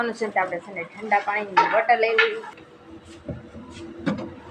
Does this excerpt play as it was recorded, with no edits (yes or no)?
no